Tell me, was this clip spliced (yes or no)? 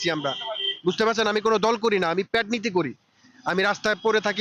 no